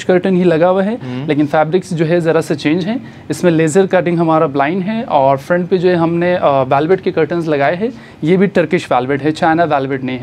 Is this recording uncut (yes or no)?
yes